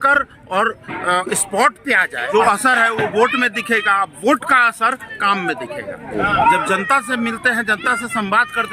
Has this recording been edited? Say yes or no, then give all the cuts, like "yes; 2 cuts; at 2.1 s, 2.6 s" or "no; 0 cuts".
yes; 2 cuts; at 2.3 s, 6.1 s